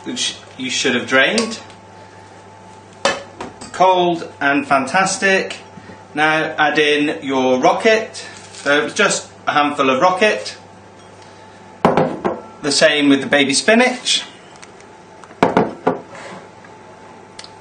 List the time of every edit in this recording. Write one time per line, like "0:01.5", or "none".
0:16.5